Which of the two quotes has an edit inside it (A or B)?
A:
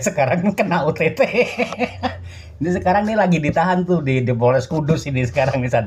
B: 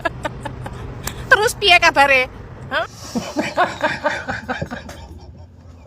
B